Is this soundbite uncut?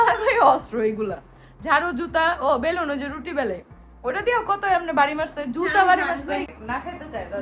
no; 1 cut; at 6.5 s

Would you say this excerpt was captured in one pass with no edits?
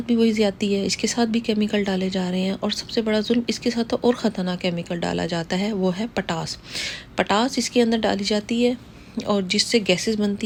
yes; 0 cuts

